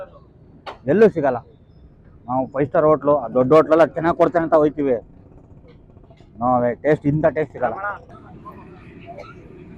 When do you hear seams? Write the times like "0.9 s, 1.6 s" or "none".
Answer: 8.1 s